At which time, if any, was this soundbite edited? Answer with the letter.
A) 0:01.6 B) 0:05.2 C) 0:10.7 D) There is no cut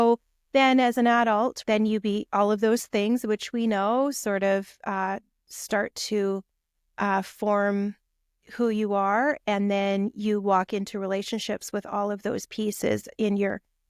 A